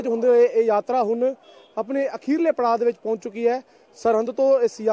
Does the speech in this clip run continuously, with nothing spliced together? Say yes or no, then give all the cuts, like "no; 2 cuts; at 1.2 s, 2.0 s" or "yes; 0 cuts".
yes; 0 cuts